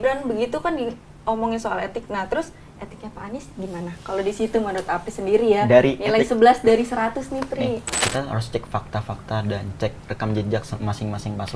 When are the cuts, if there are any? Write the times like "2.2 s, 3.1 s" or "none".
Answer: 7.9 s